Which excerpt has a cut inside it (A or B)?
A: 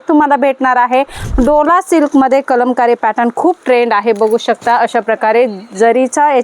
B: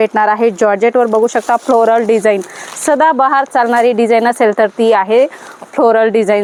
A